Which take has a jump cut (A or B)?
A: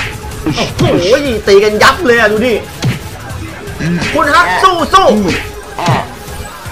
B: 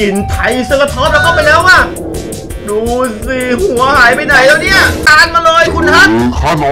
B